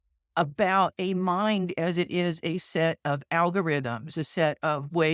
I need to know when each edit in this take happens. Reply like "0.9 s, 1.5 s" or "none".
none